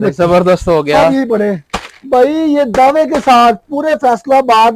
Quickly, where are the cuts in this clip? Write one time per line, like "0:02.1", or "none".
0:01.7